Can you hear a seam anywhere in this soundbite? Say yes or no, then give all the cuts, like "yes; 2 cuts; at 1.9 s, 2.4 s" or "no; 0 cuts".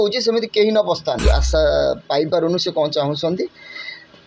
yes; 1 cut; at 1.2 s